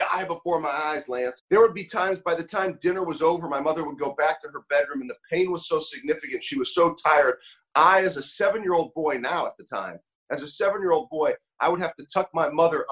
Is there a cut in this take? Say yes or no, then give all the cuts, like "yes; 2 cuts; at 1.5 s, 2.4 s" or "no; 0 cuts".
yes; 1 cut; at 1.4 s